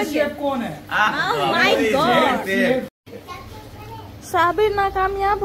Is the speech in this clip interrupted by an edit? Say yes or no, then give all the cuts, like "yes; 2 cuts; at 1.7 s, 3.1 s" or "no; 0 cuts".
yes; 1 cut; at 2.9 s